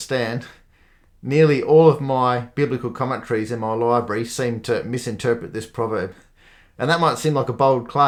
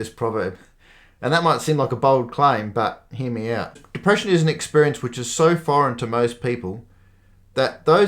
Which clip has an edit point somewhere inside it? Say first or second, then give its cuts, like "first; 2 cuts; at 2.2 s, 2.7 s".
second; 1 cut; at 3.8 s